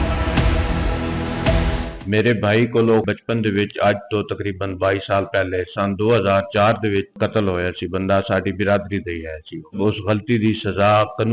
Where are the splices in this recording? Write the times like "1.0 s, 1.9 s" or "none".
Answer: 1.9 s, 3.1 s, 7.1 s, 9.8 s

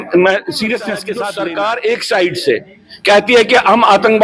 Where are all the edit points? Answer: 1.1 s

